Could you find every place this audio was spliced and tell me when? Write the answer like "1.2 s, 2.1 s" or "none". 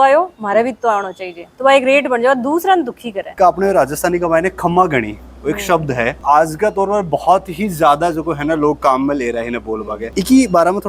3.3 s, 6.2 s, 10.0 s